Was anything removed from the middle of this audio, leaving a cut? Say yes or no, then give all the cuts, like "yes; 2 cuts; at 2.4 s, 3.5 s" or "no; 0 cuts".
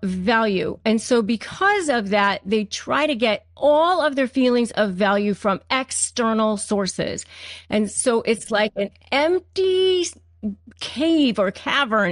no; 0 cuts